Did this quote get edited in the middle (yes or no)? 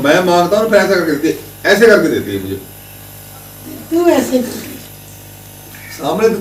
no